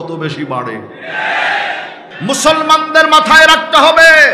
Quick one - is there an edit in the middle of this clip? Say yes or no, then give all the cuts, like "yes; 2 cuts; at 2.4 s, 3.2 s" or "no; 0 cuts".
yes; 1 cut; at 2.1 s